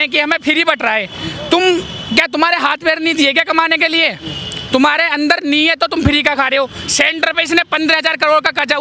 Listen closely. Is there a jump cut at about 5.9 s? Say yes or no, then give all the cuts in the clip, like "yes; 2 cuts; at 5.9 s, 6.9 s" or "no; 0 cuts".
no; 0 cuts